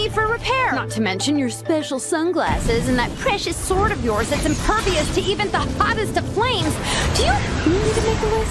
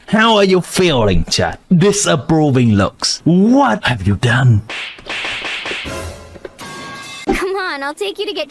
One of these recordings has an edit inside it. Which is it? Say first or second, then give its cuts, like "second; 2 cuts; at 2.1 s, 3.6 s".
second; 2 cuts; at 4.7 s, 7.2 s